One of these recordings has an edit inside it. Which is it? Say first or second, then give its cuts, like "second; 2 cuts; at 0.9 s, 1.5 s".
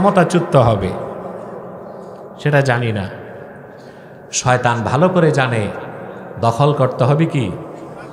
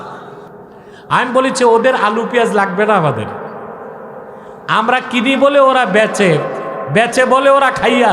second; 1 cut; at 1.0 s